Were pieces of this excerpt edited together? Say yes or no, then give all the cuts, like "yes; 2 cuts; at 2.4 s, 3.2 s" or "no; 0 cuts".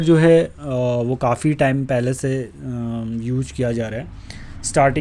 no; 0 cuts